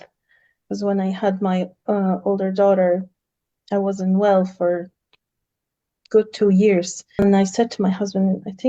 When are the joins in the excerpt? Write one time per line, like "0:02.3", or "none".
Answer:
0:07.2